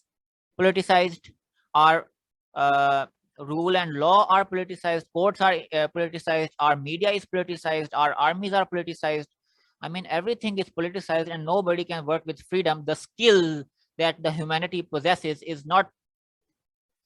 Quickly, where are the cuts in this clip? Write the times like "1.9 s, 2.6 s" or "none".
none